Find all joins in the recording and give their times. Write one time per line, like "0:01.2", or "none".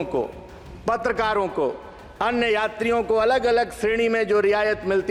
none